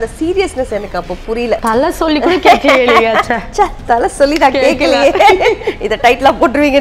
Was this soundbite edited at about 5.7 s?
no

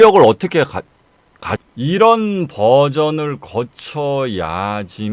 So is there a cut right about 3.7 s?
no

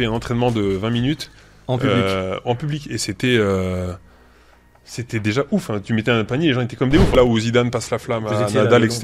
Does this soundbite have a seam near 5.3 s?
no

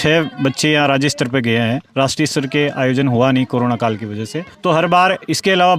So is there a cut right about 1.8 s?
no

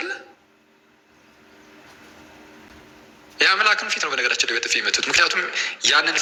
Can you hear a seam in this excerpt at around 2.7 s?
no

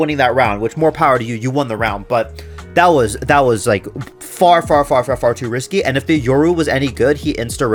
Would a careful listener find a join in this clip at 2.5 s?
no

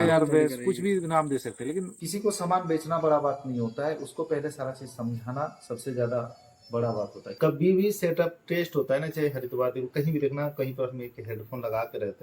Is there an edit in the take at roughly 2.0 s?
yes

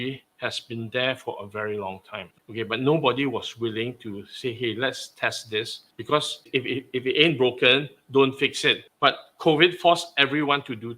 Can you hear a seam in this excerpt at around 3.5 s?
no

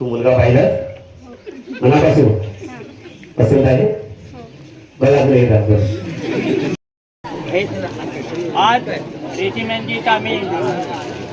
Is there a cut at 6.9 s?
yes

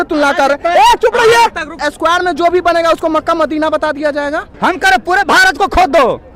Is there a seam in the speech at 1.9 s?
yes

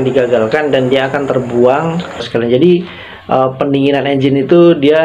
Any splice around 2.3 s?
yes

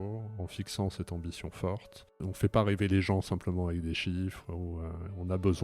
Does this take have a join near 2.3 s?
yes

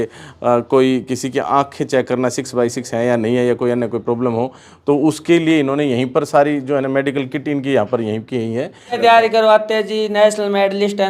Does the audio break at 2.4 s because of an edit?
no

